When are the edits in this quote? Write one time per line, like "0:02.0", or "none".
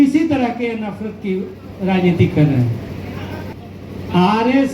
0:03.4